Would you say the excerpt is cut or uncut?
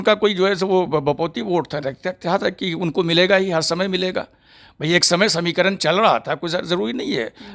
uncut